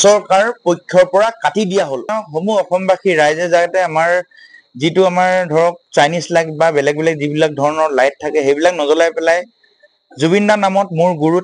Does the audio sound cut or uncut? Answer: cut